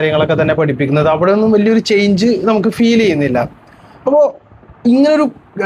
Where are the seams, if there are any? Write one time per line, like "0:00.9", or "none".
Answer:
none